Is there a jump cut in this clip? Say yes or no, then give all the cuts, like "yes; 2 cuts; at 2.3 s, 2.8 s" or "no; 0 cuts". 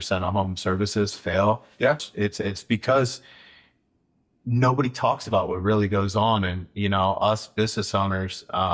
yes; 1 cut; at 2.0 s